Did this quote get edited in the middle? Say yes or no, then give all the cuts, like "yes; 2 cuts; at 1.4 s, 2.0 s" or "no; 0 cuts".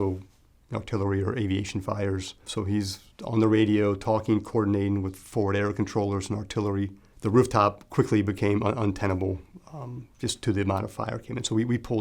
yes; 2 cuts; at 2.4 s, 7.0 s